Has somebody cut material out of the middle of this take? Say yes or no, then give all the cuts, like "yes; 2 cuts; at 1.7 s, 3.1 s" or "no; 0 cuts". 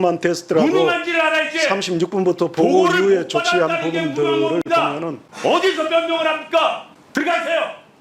yes; 2 cuts; at 5.2 s, 6.9 s